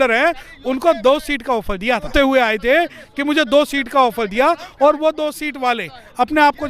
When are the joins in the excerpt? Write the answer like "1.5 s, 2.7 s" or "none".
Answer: 2.1 s